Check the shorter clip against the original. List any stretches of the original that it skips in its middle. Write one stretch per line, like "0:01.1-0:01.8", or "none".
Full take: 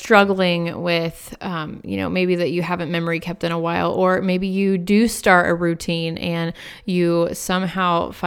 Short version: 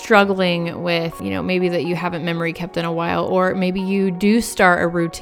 0:01.2-0:01.8